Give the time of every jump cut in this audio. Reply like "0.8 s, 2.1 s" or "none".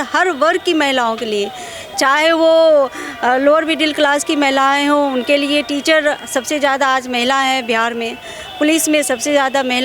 none